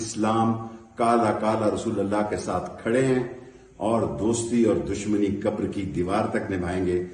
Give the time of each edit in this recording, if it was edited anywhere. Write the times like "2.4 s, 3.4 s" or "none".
none